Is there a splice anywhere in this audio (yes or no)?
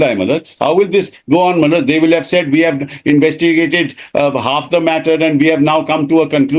no